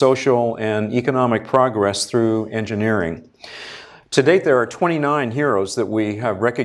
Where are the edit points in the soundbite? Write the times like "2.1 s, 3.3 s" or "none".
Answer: 2.3 s